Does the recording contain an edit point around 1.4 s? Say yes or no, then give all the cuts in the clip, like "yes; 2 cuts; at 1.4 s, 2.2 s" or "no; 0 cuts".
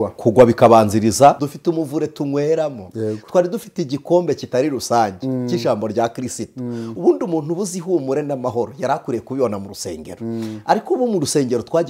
yes; 1 cut; at 1.4 s